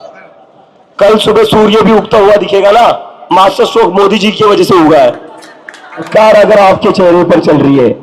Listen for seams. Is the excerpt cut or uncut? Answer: cut